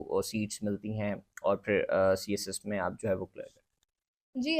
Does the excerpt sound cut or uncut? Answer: uncut